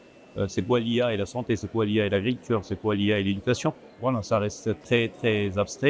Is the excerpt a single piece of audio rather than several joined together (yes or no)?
no